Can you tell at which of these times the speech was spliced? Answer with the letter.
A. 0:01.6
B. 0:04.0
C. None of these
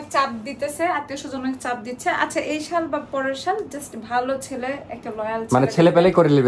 C